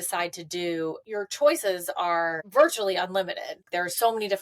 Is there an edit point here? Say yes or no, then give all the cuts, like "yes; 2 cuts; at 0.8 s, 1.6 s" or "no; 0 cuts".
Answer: yes; 3 cuts; at 1.0 s, 2.4 s, 3.7 s